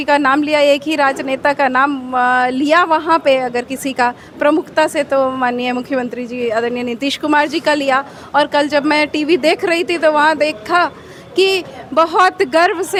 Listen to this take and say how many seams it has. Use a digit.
0